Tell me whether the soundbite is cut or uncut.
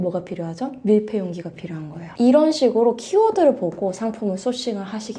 uncut